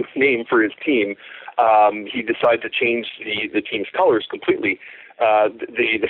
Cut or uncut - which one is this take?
uncut